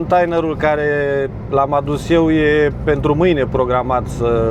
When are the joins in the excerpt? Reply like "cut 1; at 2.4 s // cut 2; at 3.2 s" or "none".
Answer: none

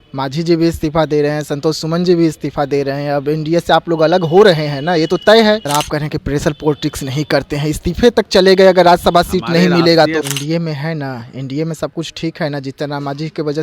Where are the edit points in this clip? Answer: cut 1; at 5.7 s // cut 2; at 10.2 s

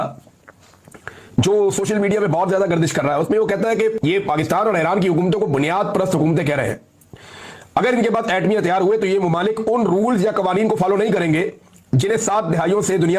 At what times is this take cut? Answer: cut 1; at 4.0 s

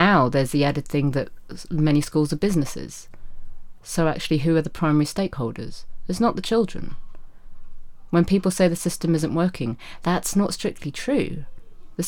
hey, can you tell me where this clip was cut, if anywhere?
none

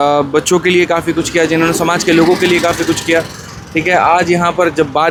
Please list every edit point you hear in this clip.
none

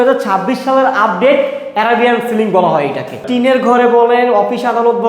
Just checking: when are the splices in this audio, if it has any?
cut 1; at 3.2 s

